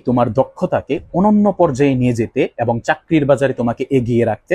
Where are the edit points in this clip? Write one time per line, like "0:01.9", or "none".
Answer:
none